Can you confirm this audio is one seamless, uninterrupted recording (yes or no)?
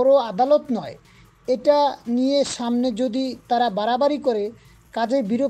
yes